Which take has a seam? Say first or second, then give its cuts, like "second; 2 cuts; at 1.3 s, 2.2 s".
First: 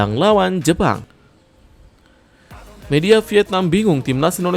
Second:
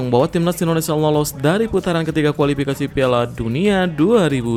first; 1 cut; at 1.1 s